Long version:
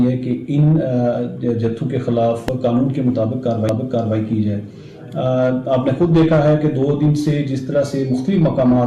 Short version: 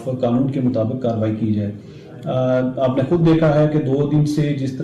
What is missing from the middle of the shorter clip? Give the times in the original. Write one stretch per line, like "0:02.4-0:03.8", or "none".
0:03.4-0:03.9